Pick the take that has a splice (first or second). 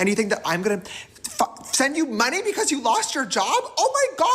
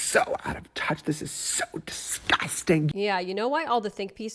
second